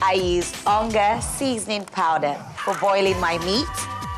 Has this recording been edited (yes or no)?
no